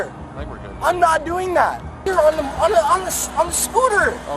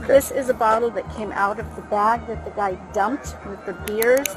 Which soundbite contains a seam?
first; 1 cut; at 1.9 s

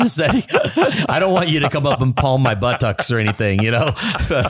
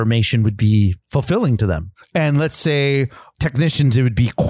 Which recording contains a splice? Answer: second; 2 cuts; at 1.0 s, 1.9 s

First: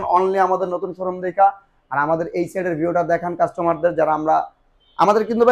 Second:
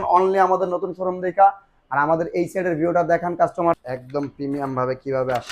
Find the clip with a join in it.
second; 1 cut; at 3.8 s

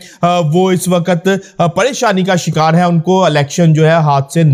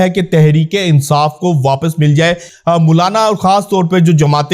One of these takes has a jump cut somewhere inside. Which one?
second; 1 cut; at 2.5 s

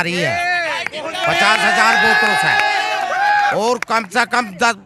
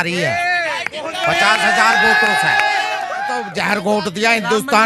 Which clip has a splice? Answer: second; 1 cut; at 3.2 s

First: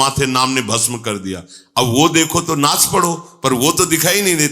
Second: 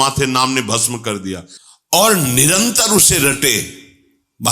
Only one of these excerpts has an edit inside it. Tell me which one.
second; 1 cut; at 1.5 s

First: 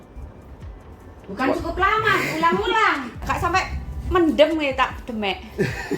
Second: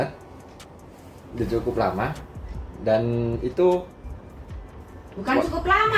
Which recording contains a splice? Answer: first; 1 cut; at 3.1 s

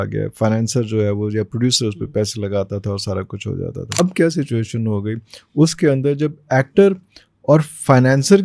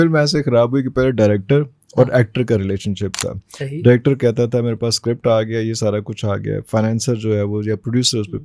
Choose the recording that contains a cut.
first; 1 cut; at 4.0 s

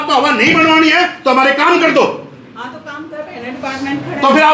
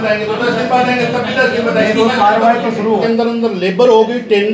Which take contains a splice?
second; 1 cut; at 3.0 s

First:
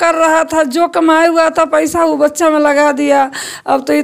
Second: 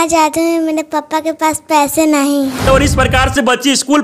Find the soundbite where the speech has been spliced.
second; 1 cut; at 2.7 s

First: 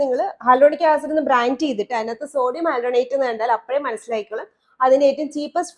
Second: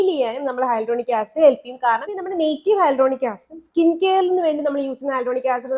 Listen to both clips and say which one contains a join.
second; 1 cut; at 2.2 s

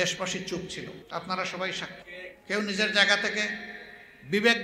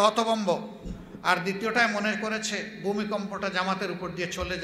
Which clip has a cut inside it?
first; 2 cuts; at 1.0 s, 2.1 s

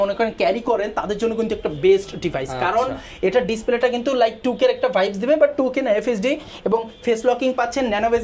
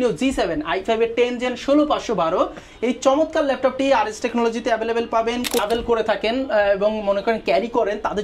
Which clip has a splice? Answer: second; 1 cut; at 5.6 s

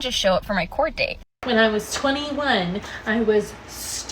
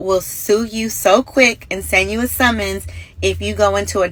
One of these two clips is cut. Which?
first; 1 cut; at 1.3 s

